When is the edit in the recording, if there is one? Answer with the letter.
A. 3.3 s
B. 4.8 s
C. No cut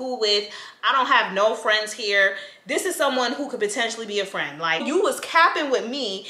B